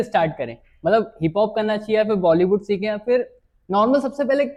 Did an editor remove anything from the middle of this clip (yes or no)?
no